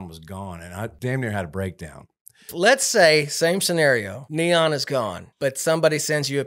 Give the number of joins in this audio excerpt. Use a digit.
4